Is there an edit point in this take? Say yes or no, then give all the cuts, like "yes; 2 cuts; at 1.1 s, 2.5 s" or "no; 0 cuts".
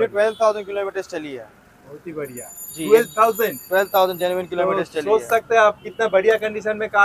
no; 0 cuts